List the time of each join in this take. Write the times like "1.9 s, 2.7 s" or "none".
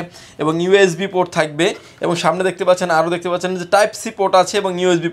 none